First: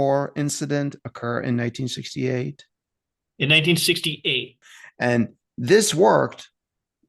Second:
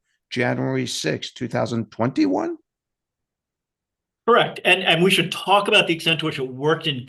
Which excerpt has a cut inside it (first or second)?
first